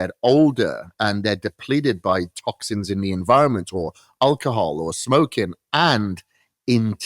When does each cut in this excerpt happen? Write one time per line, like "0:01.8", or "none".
none